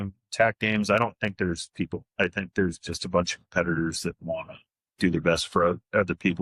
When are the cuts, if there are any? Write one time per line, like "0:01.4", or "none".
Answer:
none